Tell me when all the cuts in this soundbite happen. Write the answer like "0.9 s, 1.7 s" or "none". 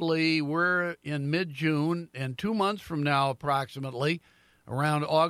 none